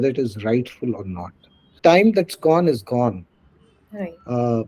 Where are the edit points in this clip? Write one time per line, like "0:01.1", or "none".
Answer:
0:01.7